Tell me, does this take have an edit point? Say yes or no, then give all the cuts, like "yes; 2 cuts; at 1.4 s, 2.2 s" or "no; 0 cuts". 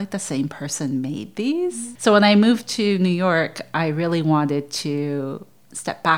no; 0 cuts